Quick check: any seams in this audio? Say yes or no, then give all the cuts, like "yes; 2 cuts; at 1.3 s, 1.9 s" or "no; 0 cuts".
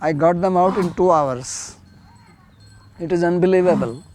no; 0 cuts